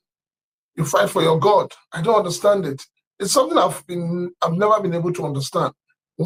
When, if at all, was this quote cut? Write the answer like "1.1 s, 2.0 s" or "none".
none